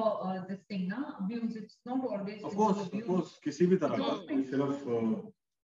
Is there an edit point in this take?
yes; 1 cut; at 4.5 s

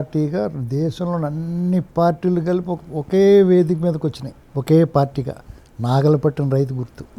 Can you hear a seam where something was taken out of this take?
no; 0 cuts

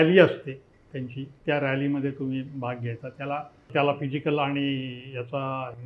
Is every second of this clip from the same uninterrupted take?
no; 1 cut; at 3.7 s

